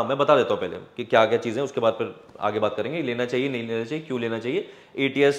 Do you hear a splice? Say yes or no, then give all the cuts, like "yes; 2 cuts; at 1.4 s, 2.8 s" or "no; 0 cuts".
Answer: no; 0 cuts